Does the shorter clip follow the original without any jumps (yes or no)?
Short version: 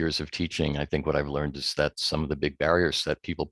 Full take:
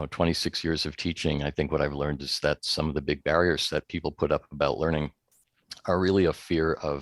yes